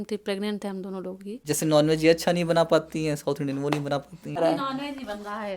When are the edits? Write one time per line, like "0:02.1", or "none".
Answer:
0:01.5
0:04.4